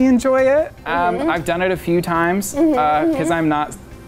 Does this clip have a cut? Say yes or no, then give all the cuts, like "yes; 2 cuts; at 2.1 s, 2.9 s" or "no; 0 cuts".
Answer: no; 0 cuts